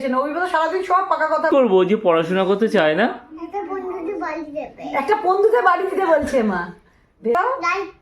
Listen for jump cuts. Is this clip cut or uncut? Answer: cut